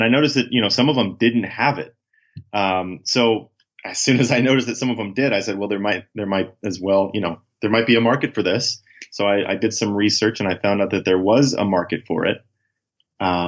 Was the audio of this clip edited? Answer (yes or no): no